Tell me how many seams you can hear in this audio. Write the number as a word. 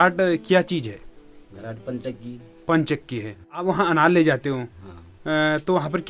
one